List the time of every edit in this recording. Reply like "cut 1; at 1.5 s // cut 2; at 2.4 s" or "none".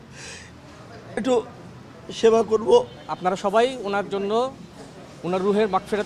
cut 1; at 3.0 s